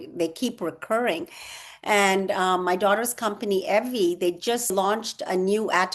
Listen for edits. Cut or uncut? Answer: cut